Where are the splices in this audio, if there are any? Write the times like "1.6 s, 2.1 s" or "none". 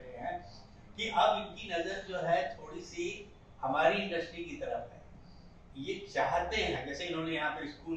none